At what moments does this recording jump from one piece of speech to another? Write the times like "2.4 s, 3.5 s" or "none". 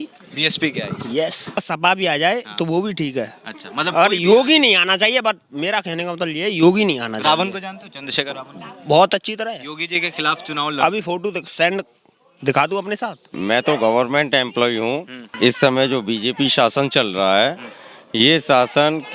1.6 s, 13.3 s, 15.2 s